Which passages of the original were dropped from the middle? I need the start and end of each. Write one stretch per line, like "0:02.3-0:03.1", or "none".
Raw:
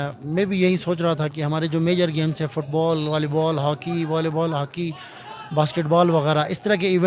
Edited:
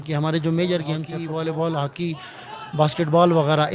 0:02.4-0:03.9